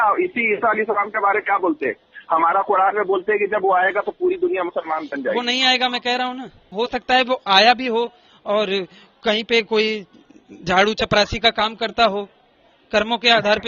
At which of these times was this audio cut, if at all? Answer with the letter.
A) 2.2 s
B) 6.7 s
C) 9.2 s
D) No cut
B